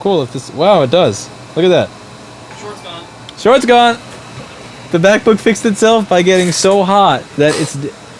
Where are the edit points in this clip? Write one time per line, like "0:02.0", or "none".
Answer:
none